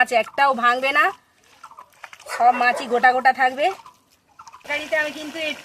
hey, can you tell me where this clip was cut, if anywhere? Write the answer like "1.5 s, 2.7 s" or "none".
4.7 s